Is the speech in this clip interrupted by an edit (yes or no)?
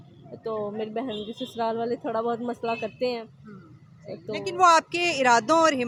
no